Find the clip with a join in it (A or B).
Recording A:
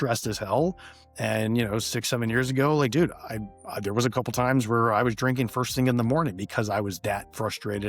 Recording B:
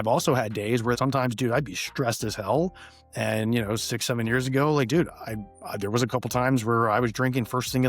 B